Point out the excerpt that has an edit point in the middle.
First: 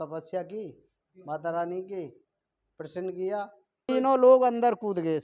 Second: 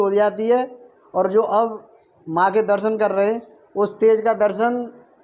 first; 1 cut; at 3.9 s

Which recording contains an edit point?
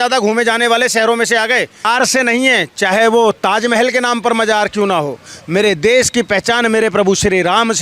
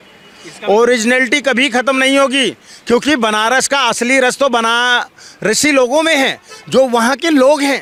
first; 1 cut; at 1.9 s

